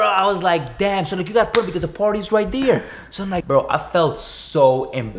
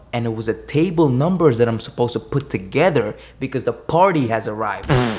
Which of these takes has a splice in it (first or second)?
first